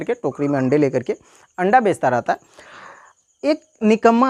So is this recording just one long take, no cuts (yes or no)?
yes